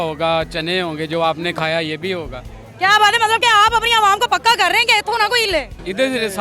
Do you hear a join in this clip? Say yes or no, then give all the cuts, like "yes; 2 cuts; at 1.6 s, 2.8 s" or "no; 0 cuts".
no; 0 cuts